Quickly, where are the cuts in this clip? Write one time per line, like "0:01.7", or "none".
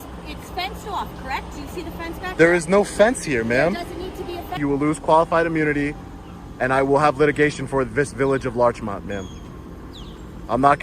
0:04.6